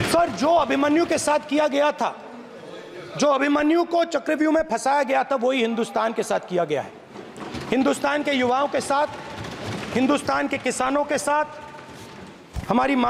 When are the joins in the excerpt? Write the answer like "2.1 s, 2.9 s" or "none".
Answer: none